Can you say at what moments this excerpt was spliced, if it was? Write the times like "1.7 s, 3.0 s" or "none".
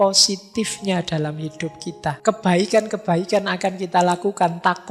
2.2 s